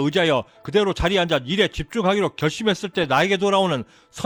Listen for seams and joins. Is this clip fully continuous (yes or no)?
yes